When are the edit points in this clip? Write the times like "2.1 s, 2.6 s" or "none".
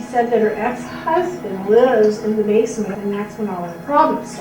2.9 s